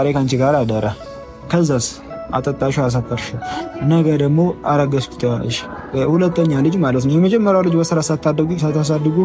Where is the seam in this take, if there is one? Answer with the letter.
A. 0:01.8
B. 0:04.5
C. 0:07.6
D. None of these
D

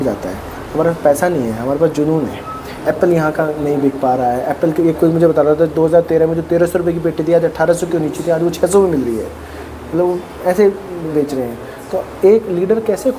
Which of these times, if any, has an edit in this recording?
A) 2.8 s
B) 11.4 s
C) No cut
A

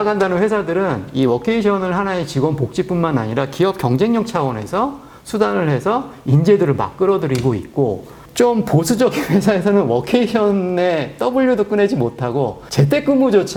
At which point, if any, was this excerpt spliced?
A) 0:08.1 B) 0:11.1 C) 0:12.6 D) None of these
D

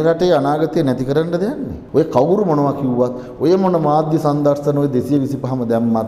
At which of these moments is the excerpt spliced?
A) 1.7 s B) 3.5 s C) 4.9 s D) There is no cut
A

